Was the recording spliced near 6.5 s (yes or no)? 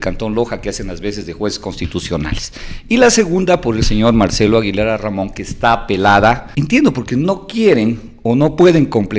yes